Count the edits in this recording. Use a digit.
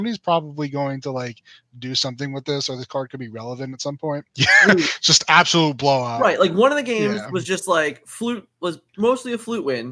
1